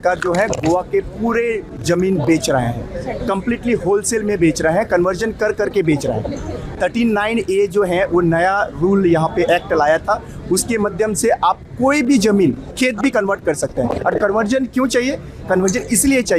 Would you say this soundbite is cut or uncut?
uncut